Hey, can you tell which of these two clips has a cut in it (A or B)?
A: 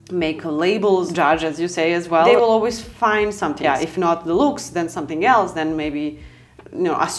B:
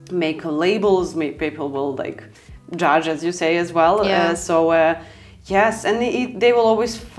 A